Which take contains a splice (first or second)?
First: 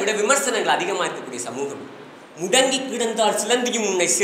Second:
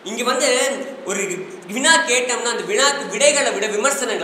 first